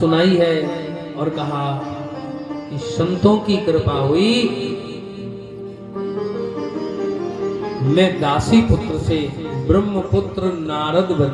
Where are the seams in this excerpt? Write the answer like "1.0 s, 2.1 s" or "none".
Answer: none